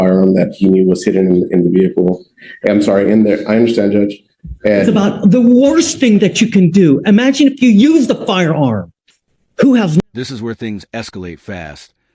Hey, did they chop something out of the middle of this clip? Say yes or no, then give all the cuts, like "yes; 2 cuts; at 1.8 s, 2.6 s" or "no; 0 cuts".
no; 0 cuts